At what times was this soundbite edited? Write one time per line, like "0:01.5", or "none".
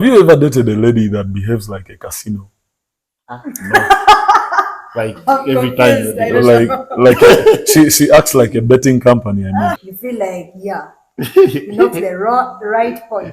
0:09.8